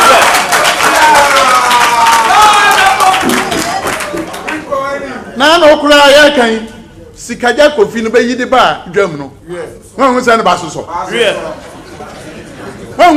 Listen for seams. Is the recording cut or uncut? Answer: uncut